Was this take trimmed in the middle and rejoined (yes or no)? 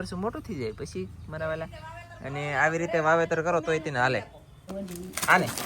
yes